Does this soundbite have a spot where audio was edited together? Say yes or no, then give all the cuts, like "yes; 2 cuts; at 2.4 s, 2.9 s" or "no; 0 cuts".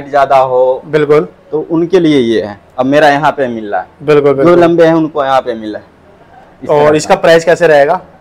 no; 0 cuts